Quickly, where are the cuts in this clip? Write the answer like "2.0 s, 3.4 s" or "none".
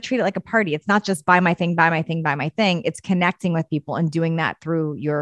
none